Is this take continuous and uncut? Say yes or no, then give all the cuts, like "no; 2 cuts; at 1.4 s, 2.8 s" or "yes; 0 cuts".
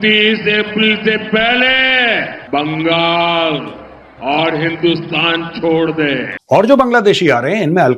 no; 1 cut; at 6.3 s